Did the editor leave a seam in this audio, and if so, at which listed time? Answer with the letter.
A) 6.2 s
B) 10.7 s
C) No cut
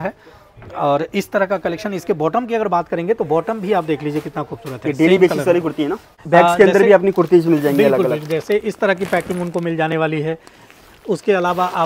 A